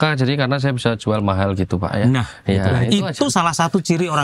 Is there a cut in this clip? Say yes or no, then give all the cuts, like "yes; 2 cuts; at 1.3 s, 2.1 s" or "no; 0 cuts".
no; 0 cuts